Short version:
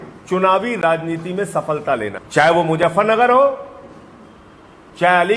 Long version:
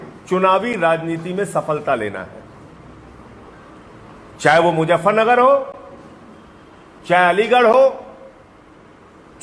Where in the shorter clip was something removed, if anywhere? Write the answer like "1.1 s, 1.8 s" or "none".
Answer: 2.2 s